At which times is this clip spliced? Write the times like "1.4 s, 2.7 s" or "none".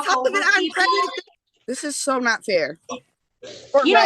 1.2 s